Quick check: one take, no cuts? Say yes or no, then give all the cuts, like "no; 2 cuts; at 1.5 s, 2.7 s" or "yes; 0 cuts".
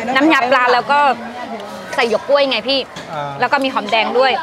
yes; 0 cuts